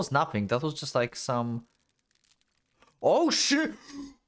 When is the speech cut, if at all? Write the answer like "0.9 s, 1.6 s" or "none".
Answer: none